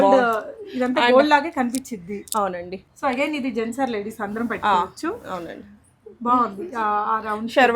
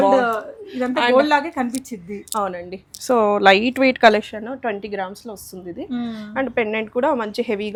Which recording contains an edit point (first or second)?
first